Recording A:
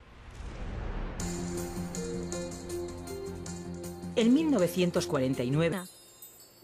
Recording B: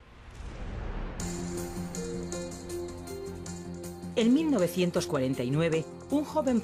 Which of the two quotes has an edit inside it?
B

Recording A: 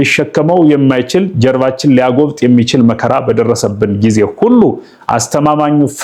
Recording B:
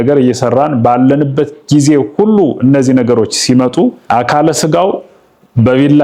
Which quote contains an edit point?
B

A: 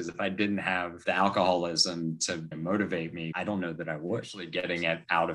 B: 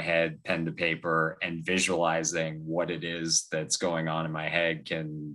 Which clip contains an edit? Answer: A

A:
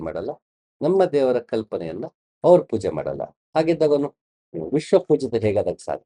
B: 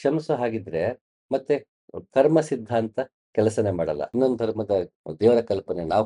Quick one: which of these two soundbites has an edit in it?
B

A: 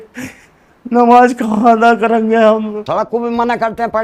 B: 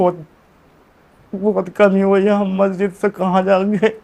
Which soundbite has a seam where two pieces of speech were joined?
A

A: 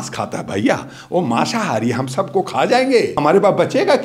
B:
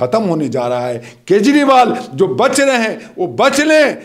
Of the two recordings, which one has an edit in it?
A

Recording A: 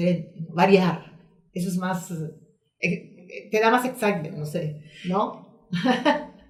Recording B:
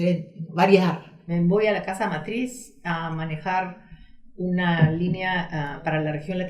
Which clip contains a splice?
B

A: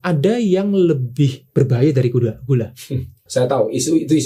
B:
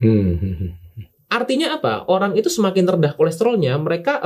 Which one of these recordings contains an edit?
A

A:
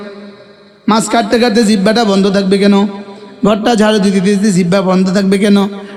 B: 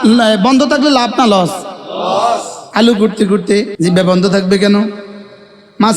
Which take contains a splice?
B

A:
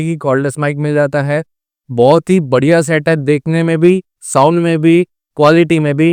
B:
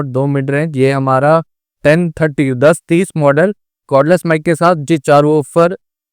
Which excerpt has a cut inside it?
B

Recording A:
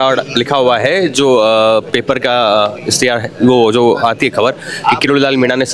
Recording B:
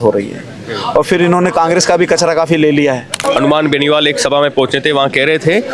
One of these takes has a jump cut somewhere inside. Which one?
B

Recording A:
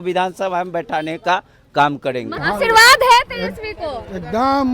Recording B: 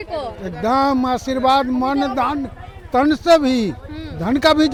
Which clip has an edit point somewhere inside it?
A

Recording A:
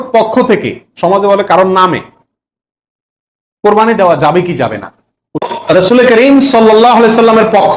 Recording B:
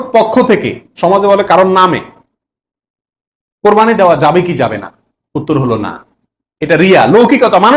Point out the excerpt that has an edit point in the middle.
A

